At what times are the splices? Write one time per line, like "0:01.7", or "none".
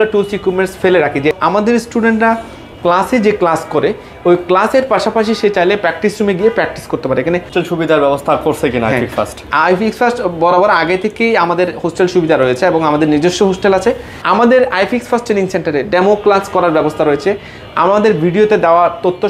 0:01.3
0:07.5
0:14.1